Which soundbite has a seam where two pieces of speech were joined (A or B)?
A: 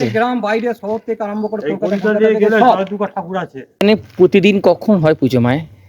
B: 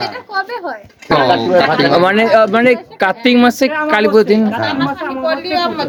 A